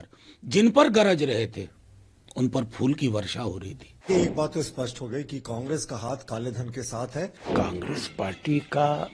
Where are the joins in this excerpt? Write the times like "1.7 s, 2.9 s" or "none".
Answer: 4.1 s, 7.4 s